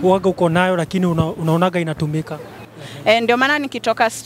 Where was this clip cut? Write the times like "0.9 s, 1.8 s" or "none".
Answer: 2.6 s